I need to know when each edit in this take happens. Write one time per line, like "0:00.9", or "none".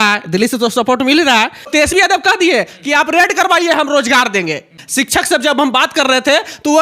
0:01.7
0:04.8